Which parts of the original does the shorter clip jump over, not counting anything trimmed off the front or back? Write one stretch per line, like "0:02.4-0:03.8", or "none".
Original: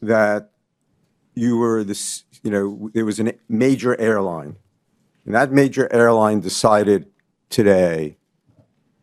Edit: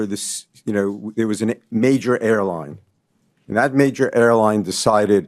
none